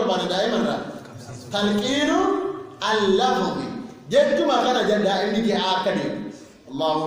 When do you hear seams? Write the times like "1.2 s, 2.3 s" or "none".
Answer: none